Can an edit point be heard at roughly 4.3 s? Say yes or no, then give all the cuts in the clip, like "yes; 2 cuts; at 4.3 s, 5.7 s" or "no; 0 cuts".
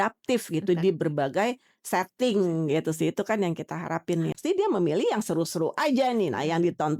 yes; 1 cut; at 4.3 s